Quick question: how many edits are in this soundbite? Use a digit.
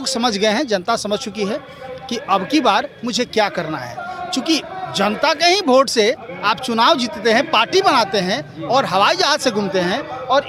0